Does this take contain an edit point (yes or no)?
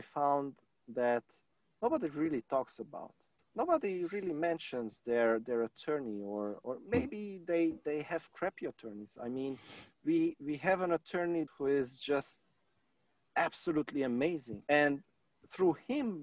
yes